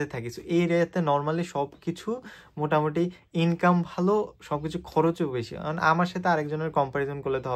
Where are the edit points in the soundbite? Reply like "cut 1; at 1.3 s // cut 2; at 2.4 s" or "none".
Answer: none

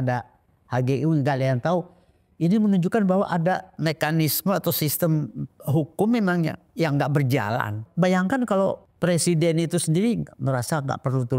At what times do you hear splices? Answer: cut 1; at 3.7 s // cut 2; at 7.8 s // cut 3; at 8.9 s

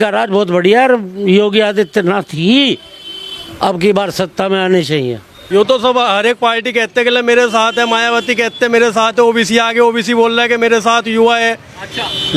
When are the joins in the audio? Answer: cut 1; at 5.3 s

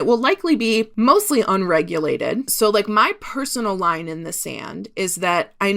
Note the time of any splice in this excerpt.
cut 1; at 0.9 s // cut 2; at 2.5 s

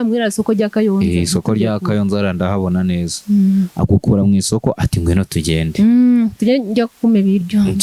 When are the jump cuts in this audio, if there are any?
none

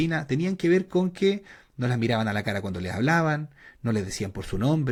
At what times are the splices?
none

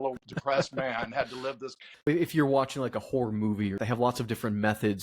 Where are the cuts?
cut 1; at 2.1 s // cut 2; at 3.8 s

